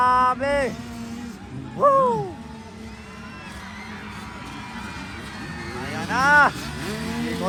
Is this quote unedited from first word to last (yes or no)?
yes